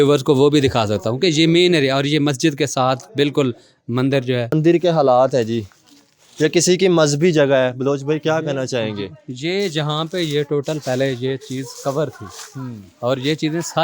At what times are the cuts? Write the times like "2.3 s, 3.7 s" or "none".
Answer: 4.5 s